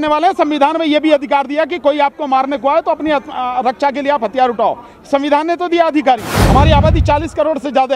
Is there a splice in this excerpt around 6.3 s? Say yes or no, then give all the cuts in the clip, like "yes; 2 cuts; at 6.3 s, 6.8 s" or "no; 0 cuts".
yes; 1 cut; at 6.3 s